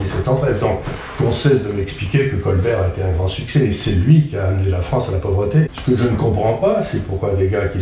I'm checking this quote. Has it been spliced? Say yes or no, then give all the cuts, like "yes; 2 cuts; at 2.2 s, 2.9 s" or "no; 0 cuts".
yes; 1 cut; at 5.7 s